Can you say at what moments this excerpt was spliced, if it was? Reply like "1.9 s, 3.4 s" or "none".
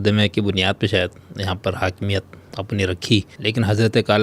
3.3 s